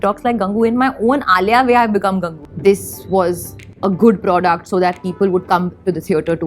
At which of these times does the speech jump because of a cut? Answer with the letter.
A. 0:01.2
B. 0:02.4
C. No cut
B